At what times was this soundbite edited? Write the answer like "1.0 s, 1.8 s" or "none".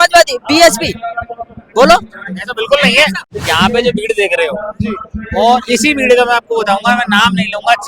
3.3 s